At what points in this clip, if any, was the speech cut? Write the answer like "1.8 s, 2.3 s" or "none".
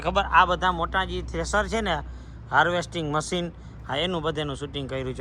none